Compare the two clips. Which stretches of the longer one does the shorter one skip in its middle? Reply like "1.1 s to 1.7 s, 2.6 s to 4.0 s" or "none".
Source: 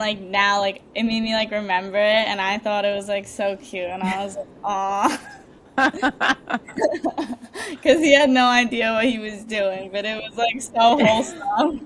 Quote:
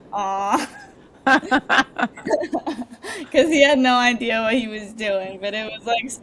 none